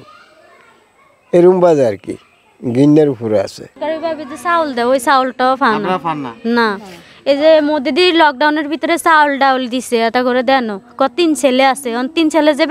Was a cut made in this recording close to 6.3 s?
no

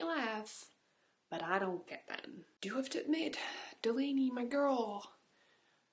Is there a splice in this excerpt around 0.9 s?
no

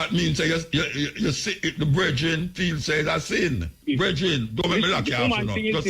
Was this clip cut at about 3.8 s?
yes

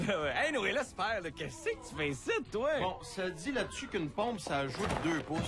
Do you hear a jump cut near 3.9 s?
no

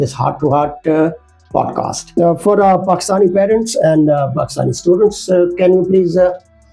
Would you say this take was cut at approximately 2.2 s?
yes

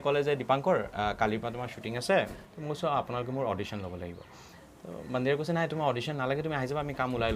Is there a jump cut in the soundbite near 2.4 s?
yes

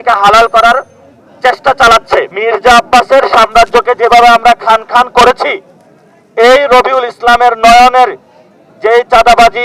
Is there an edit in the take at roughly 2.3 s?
yes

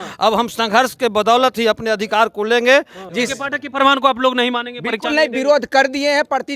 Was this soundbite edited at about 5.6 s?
no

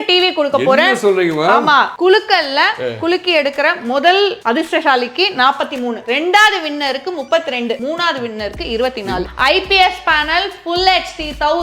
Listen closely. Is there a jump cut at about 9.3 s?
yes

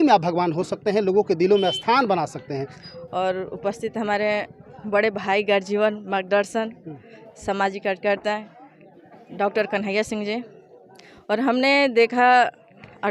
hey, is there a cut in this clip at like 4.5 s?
no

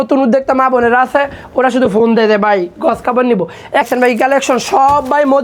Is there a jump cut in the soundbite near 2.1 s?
no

